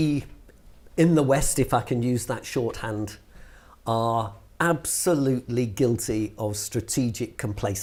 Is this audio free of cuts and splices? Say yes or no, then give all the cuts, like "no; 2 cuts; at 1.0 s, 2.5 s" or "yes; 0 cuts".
yes; 0 cuts